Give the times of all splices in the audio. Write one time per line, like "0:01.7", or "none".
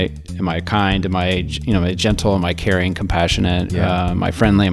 none